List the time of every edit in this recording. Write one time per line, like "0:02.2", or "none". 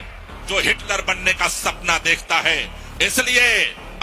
none